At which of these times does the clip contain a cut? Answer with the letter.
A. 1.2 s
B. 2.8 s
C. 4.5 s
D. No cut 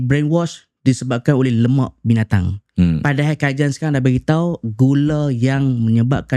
D